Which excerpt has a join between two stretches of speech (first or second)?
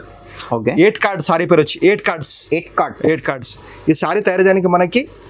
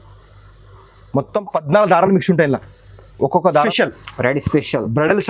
second